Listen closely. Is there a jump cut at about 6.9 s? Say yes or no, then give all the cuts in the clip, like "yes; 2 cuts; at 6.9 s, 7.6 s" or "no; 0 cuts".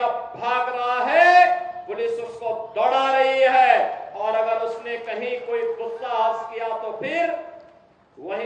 no; 0 cuts